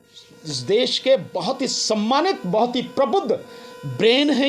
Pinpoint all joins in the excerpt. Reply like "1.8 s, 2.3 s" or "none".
none